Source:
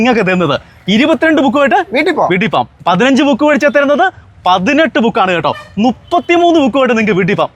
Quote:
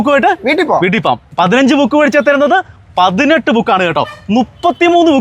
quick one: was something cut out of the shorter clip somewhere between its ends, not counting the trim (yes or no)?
no